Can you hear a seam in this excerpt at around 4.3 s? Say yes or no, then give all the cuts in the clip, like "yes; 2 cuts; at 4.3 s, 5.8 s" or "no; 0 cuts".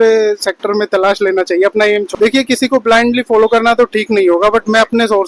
no; 1 cut; at 2.1 s